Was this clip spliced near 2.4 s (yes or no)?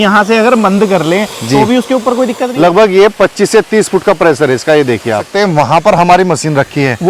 yes